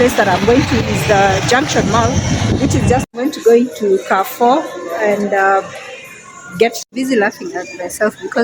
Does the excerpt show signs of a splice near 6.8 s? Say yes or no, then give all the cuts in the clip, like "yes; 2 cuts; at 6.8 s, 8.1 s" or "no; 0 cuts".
yes; 2 cuts; at 3.0 s, 6.8 s